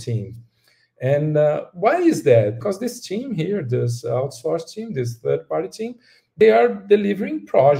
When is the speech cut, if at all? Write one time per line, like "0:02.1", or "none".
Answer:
0:02.6
0:06.4